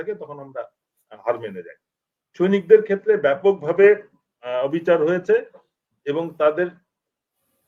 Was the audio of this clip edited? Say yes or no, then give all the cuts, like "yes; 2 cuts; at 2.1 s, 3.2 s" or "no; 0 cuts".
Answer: no; 0 cuts